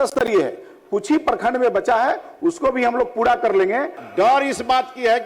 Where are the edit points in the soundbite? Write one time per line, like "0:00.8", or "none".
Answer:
0:04.0